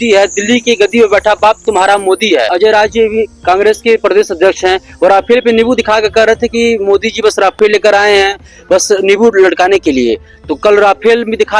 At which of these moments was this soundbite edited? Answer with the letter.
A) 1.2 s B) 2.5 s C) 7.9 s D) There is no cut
B